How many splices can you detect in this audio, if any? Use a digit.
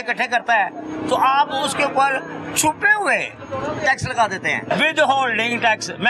1